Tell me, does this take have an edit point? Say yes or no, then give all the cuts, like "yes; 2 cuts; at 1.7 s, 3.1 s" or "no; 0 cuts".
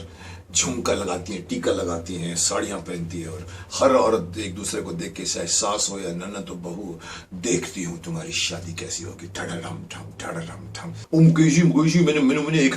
yes; 1 cut; at 11.0 s